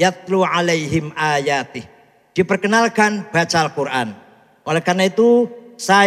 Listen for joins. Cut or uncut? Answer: uncut